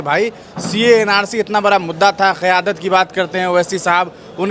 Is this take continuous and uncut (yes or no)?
yes